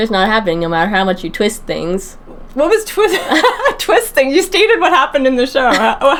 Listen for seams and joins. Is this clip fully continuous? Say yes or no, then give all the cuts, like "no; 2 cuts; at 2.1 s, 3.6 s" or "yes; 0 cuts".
yes; 0 cuts